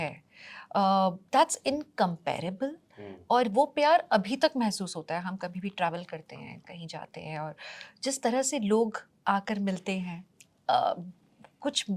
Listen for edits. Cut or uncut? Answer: uncut